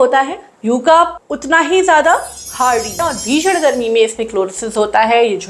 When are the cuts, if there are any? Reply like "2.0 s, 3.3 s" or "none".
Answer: 3.0 s